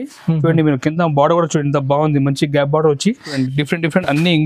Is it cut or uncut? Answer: cut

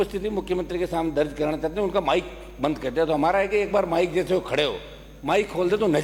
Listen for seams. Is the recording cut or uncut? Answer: uncut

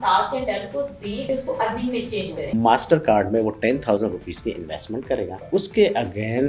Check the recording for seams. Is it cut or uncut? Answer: cut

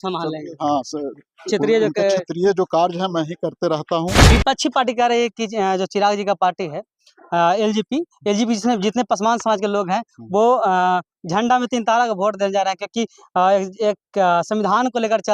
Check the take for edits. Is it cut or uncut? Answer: cut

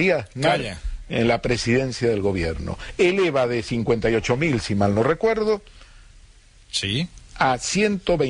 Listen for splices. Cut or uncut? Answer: cut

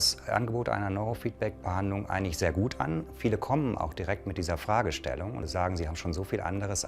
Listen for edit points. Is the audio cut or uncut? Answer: cut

